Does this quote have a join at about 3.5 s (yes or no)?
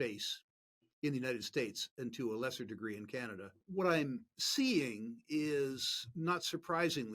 yes